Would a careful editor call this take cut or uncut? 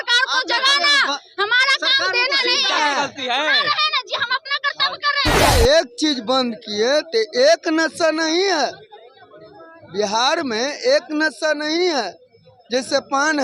cut